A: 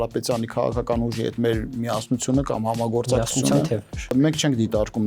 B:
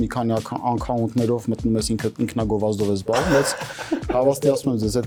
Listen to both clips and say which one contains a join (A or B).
A